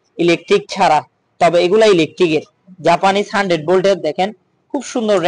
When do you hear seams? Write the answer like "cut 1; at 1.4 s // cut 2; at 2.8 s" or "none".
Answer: none